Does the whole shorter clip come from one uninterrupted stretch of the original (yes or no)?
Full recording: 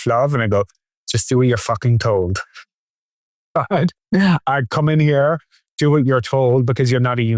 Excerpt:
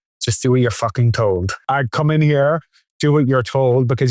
no